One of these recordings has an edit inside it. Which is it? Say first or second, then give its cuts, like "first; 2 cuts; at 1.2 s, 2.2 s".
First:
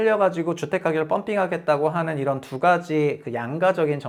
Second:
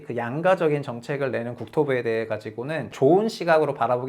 second; 1 cut; at 2.9 s